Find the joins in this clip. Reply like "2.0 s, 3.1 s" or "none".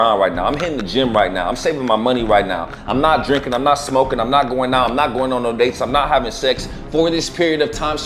none